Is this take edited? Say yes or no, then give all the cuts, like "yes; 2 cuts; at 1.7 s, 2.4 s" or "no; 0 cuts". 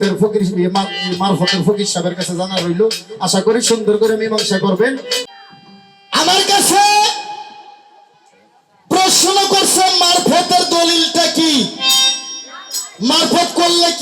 yes; 1 cut; at 5.3 s